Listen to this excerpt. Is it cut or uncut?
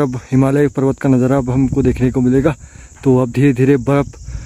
uncut